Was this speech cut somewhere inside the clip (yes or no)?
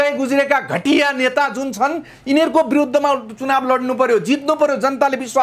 no